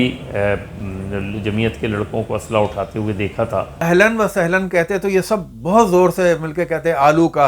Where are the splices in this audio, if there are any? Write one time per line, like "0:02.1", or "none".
0:03.7